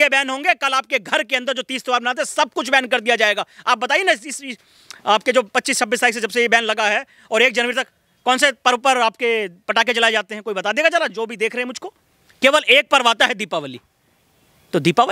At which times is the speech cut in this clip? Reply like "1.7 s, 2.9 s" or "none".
none